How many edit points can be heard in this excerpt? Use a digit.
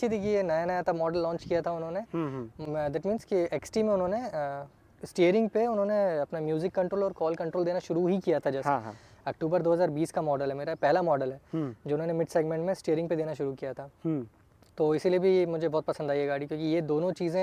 0